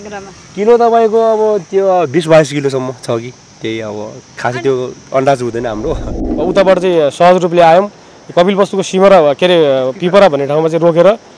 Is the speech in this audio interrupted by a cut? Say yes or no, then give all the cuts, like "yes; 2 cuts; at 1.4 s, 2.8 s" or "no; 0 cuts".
yes; 1 cut; at 6.3 s